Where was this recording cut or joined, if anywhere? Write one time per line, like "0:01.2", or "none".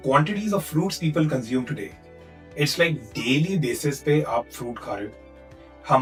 none